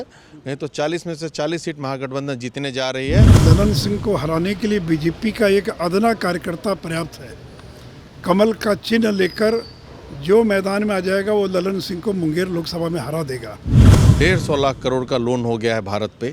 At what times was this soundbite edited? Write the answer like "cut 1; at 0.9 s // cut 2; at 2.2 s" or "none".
cut 1; at 3.4 s // cut 2; at 14.0 s

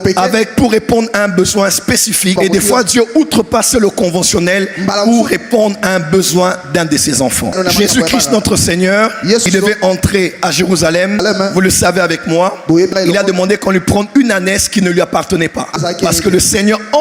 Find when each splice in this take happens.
none

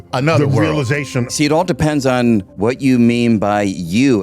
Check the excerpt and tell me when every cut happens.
cut 1; at 1.2 s // cut 2; at 2.5 s

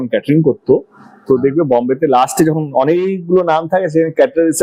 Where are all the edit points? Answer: none

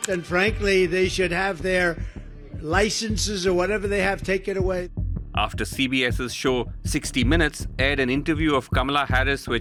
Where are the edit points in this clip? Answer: none

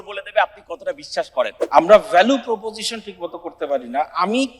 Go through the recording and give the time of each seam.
cut 1; at 1.6 s

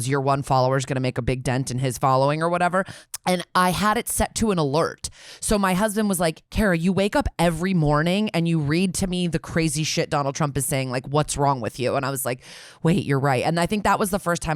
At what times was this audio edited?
cut 1; at 3.0 s

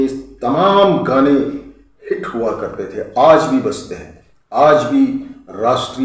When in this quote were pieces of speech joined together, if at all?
none

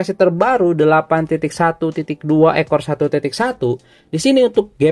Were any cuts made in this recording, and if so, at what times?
none

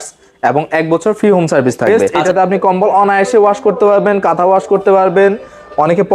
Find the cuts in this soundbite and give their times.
cut 1; at 2.1 s

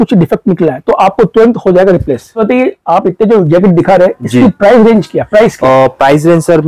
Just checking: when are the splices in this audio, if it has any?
cut 1; at 2.4 s

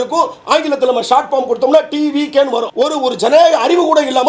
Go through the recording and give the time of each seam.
cut 1; at 2.7 s

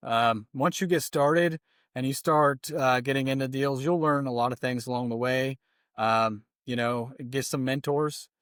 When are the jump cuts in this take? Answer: none

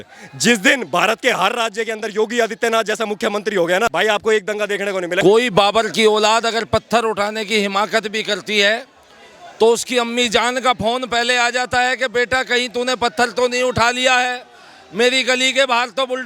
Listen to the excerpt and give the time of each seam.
cut 1; at 3.9 s // cut 2; at 5.2 s

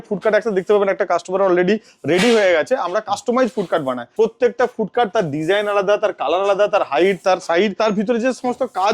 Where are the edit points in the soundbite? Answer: cut 1; at 4.0 s // cut 2; at 7.7 s

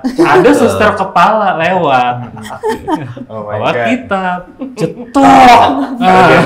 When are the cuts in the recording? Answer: none

